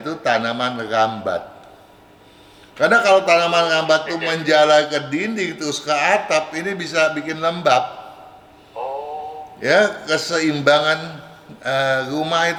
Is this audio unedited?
yes; 0 cuts

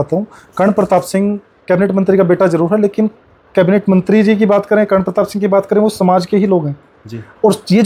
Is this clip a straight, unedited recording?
yes; 0 cuts

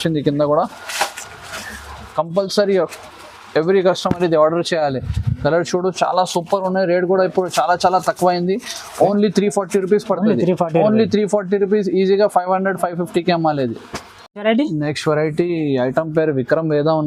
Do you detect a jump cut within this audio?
no; 0 cuts

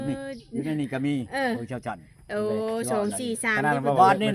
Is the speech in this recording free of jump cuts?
yes; 0 cuts

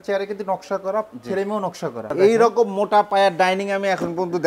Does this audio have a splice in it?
yes; 1 cut; at 2.1 s

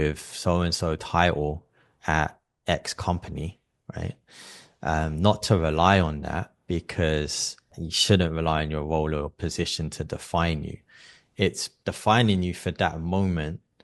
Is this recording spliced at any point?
yes; 2 cuts; at 7.9 s, 11.7 s

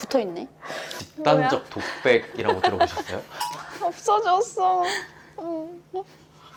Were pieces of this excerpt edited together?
no; 0 cuts

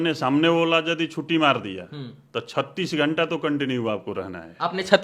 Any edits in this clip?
no; 0 cuts

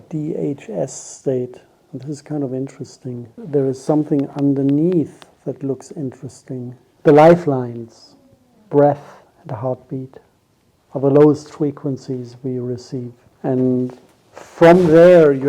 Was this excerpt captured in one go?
no; 3 cuts; at 3.3 s, 6.8 s, 13.2 s

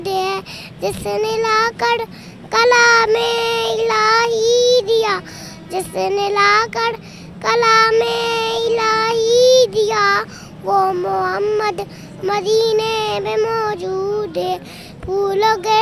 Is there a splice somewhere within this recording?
no; 0 cuts

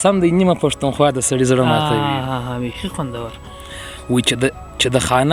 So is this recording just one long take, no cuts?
yes; 0 cuts

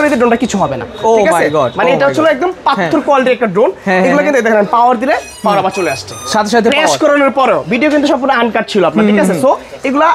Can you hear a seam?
no; 0 cuts

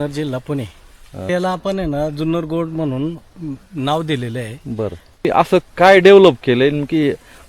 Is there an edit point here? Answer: yes; 2 cuts; at 1.3 s, 5.3 s

